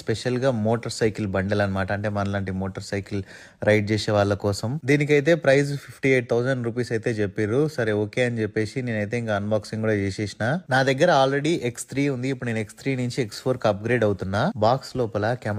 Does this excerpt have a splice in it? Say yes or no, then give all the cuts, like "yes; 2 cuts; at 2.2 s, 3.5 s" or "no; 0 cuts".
no; 0 cuts